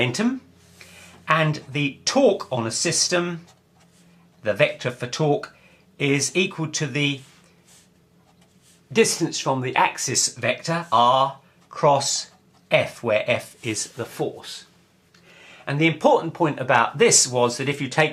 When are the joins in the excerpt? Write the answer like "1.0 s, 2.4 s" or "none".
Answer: none